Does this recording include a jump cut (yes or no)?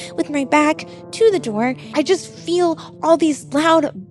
yes